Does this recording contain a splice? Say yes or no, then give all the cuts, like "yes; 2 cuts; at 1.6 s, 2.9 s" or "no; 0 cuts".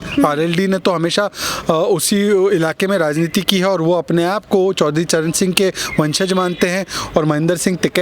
no; 0 cuts